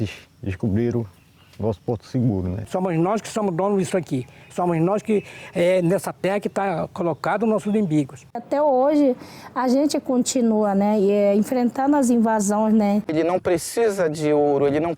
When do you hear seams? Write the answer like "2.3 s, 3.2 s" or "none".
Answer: 2.6 s, 8.4 s, 13.1 s